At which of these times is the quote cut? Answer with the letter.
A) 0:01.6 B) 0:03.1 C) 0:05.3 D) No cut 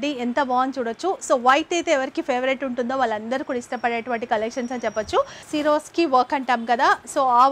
C